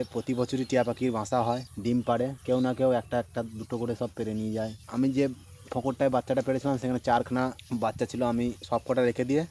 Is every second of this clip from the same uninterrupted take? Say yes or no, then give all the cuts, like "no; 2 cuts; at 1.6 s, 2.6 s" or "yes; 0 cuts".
no; 5 cuts; at 1.7 s, 2.4 s, 4.8 s, 7.6 s, 8.6 s